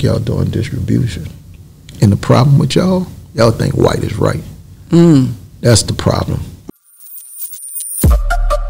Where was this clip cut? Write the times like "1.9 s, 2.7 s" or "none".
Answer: 6.7 s